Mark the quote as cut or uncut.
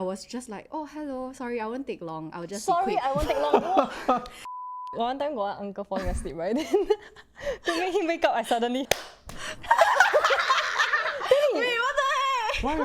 cut